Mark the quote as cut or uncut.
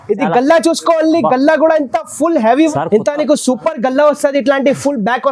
cut